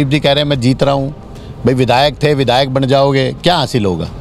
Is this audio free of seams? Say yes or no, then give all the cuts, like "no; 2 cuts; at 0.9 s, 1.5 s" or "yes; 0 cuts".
yes; 0 cuts